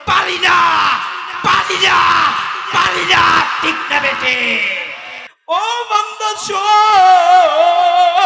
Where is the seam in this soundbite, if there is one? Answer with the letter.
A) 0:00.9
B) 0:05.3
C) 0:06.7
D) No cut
B